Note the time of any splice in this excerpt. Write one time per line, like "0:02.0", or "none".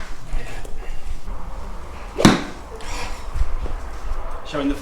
0:01.3